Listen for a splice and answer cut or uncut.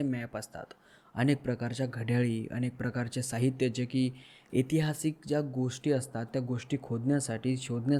uncut